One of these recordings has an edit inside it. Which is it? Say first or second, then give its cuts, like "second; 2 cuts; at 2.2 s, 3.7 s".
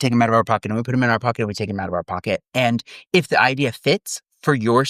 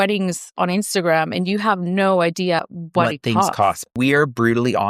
second; 2 cuts; at 2.6 s, 3.9 s